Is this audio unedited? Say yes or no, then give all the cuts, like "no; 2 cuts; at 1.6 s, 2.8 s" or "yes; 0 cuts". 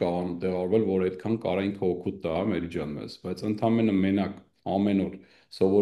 yes; 0 cuts